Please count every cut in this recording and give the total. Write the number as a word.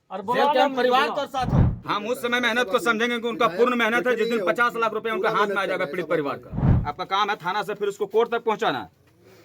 two